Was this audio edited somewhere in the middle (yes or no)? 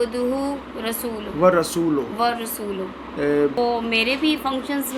yes